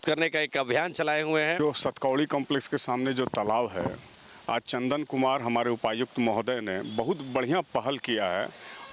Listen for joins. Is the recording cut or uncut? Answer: cut